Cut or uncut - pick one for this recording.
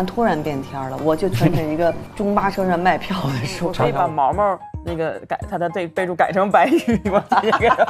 cut